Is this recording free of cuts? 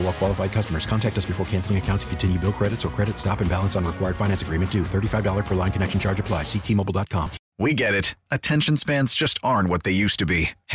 no; 1 cut; at 7.4 s

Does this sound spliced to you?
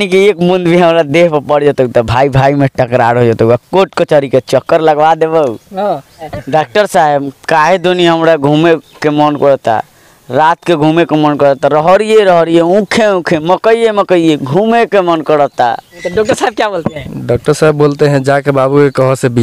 yes; 2 cuts; at 6.3 s, 15.9 s

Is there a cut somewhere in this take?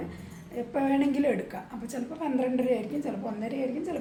no; 0 cuts

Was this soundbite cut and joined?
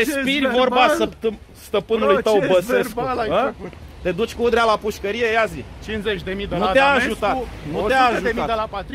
no; 0 cuts

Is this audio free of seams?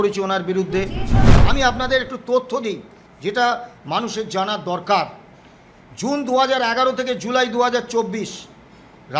no; 1 cut; at 1.3 s

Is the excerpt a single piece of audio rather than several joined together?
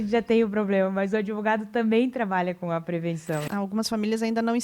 no; 1 cut; at 3.5 s

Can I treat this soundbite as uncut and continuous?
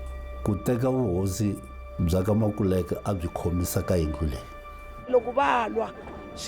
no; 1 cut; at 5.1 s

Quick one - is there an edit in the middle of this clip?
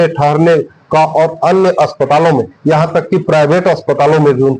no; 0 cuts

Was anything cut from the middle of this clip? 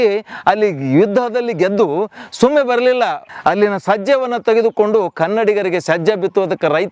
yes; 1 cut; at 3.3 s

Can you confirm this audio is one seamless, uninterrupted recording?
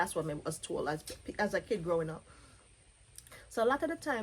yes; 0 cuts

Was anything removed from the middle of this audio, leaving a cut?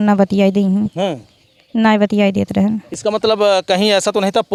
no; 0 cuts

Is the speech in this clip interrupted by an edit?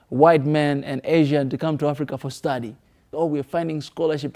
yes; 1 cut; at 3.1 s

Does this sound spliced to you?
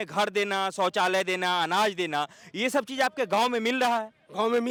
no; 0 cuts

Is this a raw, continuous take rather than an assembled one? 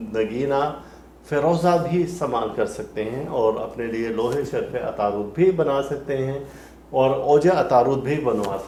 yes; 0 cuts

